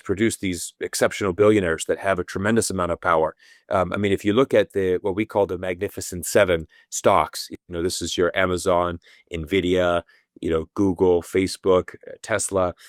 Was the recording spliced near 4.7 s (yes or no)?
no